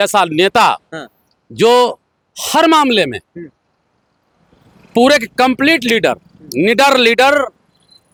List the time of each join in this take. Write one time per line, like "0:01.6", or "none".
none